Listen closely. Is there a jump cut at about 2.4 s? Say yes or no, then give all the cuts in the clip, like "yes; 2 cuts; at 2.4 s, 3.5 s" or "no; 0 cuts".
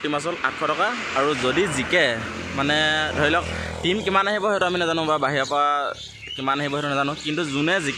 no; 0 cuts